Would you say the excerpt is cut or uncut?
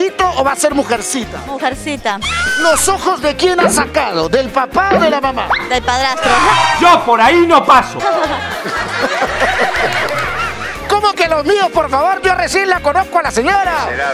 uncut